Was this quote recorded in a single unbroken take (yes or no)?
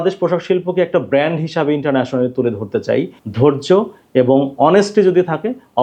no